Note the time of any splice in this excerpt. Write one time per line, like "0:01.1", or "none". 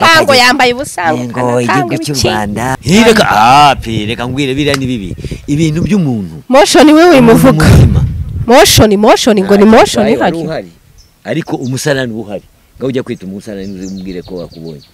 0:02.8